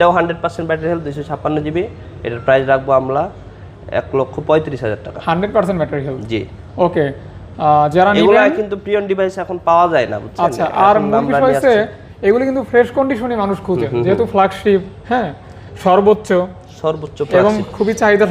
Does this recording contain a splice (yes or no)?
no